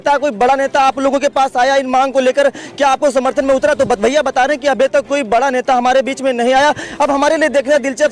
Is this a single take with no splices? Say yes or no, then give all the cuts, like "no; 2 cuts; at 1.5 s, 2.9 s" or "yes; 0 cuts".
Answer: yes; 0 cuts